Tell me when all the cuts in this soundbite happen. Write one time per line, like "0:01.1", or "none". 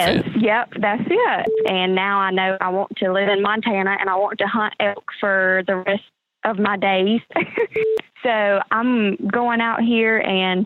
0:01.6
0:07.8